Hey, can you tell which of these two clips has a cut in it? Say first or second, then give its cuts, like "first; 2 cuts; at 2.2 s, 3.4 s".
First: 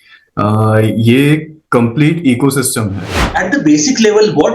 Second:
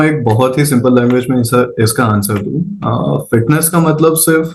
first; 1 cut; at 3.2 s